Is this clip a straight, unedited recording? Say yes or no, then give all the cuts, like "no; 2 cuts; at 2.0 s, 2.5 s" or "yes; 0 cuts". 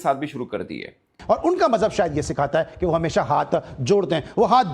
no; 1 cut; at 1.2 s